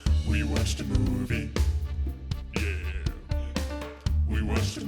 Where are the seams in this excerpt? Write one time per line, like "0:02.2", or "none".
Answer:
none